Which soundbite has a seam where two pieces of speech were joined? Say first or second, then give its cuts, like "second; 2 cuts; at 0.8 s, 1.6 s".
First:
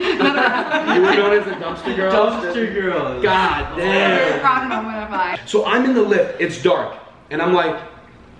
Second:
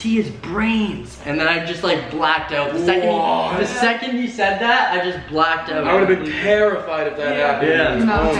first; 1 cut; at 5.4 s